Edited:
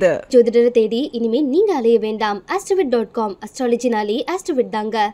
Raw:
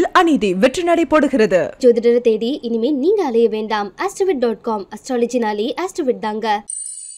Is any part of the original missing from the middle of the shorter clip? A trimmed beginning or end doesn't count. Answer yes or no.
no